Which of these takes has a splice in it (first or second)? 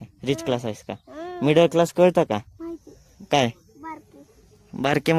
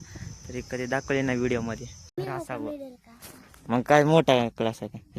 second